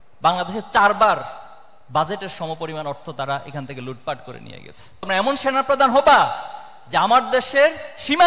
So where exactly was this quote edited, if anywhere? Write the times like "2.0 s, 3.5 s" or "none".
5.0 s